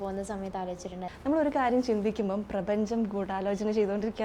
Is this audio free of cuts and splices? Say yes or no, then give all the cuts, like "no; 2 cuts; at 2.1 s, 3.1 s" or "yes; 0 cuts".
no; 1 cut; at 1.0 s